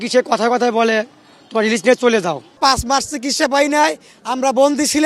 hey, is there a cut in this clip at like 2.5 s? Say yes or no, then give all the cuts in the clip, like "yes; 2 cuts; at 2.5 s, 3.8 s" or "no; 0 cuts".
yes; 1 cut; at 2.5 s